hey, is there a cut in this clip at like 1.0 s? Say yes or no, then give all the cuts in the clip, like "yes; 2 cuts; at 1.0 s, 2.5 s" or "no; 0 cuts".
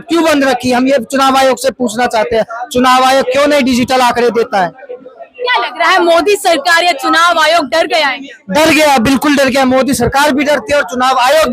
no; 0 cuts